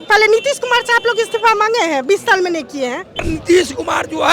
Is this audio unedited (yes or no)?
no